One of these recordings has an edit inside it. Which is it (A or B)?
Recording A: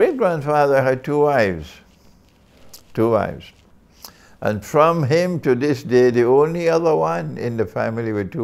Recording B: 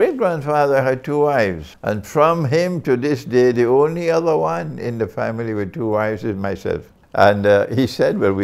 B